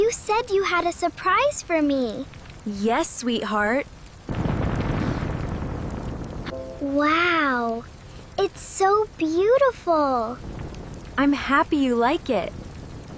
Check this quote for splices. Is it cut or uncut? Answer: uncut